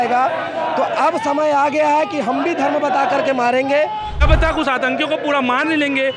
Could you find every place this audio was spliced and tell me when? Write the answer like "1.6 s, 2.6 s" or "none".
4.2 s